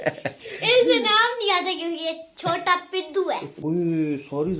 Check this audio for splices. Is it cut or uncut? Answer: cut